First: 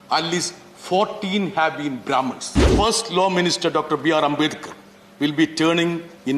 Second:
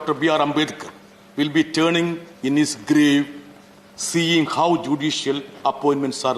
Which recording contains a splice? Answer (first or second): first